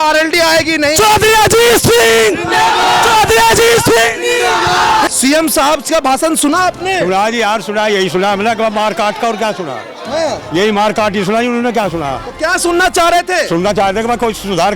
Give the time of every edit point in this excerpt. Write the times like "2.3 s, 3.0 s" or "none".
5.1 s